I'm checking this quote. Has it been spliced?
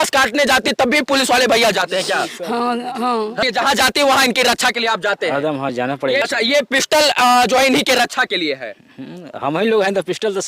yes; 2 cuts; at 3.4 s, 6.2 s

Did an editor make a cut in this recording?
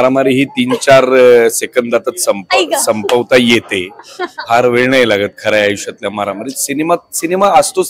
no; 0 cuts

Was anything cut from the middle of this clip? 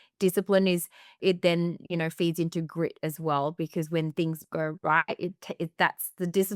yes; 1 cut; at 1.2 s

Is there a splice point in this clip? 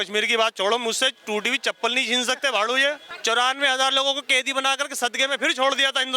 yes; 1 cut; at 3.1 s

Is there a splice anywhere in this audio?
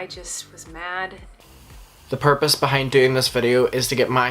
yes; 1 cut; at 1.4 s

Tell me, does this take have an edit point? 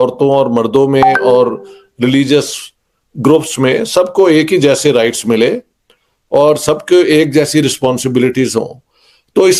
no; 0 cuts

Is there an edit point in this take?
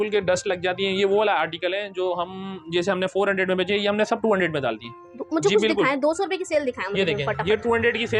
no; 0 cuts

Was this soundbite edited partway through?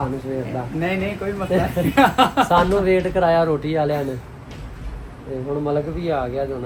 no; 0 cuts

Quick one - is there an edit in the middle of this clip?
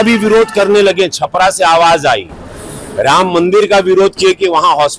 no; 0 cuts

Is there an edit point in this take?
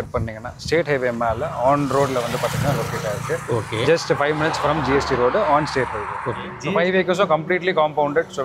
yes; 1 cut; at 6.5 s

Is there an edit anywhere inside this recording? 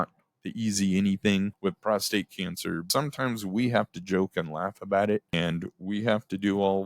yes; 3 cuts; at 1.5 s, 2.9 s, 5.3 s

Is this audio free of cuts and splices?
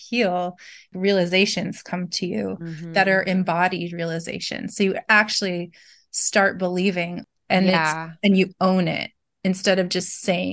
no; 2 cuts; at 0.9 s, 7.2 s

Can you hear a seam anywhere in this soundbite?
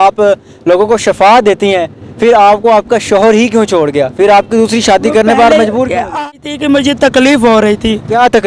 yes; 1 cut; at 6.3 s

